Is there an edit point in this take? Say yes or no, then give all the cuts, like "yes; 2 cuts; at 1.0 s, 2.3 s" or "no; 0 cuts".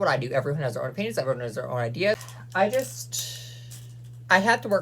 yes; 1 cut; at 2.4 s